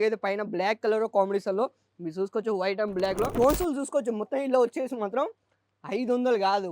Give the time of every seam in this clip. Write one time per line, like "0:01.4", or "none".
0:03.3

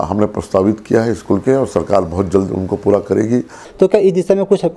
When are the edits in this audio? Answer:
0:03.6

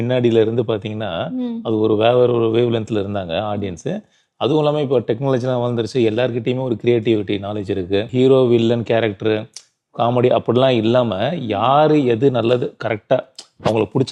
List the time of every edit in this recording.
0:08.1

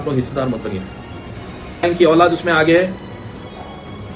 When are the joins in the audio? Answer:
0:01.8

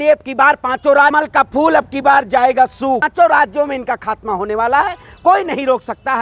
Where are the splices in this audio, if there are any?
0:01.1
0:03.1

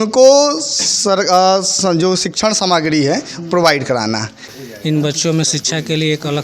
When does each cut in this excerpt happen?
0:04.4

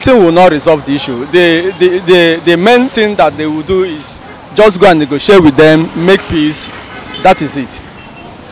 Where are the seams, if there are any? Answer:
none

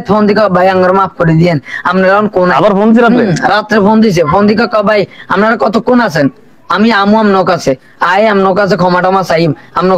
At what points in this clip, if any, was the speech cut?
none

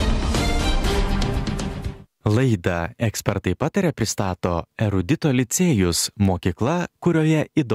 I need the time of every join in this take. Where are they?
0:02.0

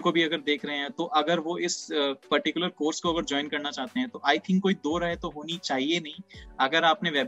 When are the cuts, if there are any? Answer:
none

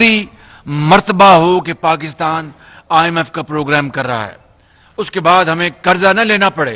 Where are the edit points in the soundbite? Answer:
none

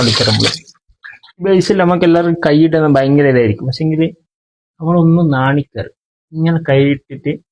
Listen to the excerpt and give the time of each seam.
0:01.4

